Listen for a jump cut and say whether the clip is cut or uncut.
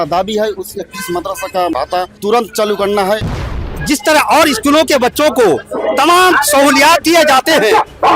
cut